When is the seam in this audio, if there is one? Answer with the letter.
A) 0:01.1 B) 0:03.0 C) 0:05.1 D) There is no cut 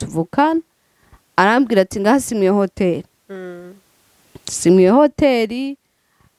D